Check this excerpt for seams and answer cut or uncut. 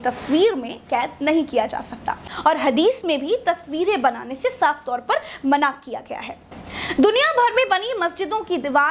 cut